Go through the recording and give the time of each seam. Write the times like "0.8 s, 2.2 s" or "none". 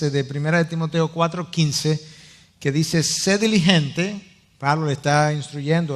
4.8 s